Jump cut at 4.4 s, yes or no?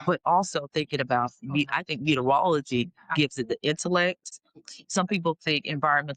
yes